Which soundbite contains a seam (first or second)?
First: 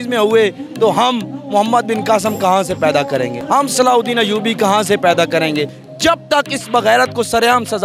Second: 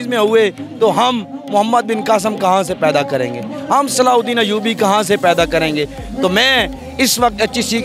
first